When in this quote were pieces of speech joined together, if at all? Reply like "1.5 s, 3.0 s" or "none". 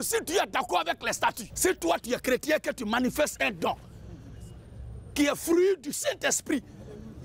1.5 s